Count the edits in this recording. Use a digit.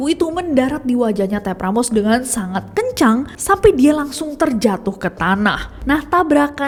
0